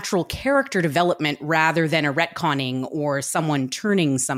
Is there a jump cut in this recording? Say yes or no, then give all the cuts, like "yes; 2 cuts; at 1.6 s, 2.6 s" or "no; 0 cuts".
no; 0 cuts